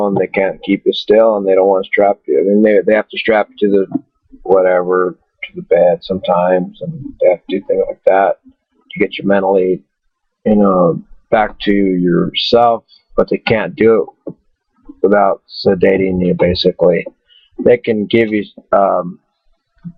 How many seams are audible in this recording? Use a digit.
0